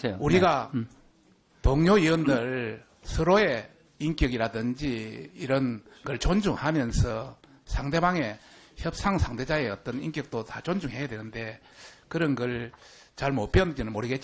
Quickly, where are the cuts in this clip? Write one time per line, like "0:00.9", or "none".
0:06.3